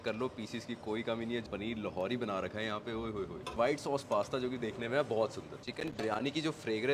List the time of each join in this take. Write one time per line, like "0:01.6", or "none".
0:01.4
0:03.5
0:05.6